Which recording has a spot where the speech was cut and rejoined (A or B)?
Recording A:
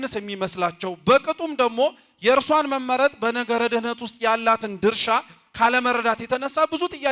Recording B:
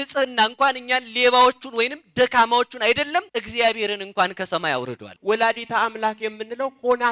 B